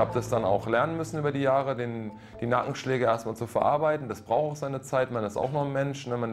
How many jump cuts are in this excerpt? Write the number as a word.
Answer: zero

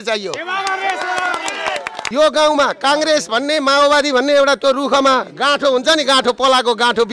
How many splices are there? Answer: one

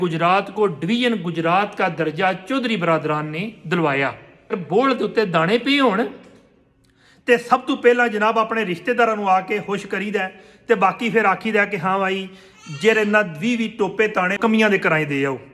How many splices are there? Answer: two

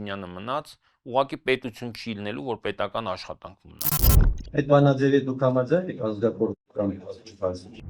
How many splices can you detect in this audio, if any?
one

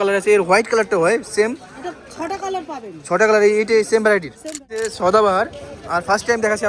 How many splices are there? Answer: one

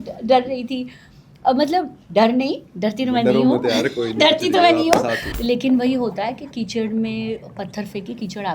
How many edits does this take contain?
one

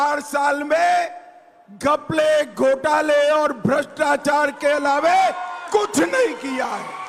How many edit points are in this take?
zero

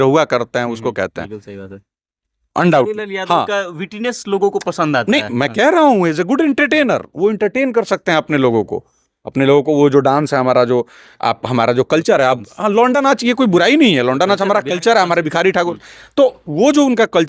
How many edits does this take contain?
zero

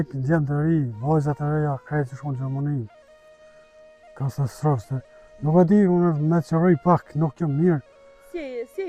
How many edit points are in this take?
zero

